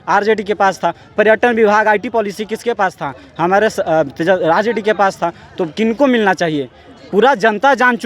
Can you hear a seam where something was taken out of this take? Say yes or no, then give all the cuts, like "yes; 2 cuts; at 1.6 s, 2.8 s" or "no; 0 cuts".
no; 0 cuts